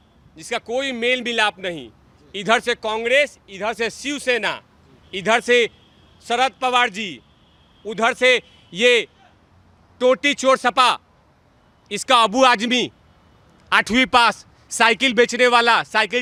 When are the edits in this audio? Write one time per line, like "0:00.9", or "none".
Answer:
none